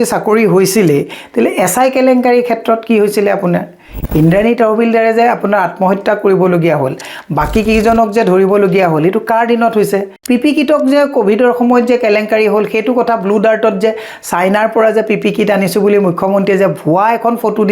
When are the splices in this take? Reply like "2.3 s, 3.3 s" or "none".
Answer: 10.1 s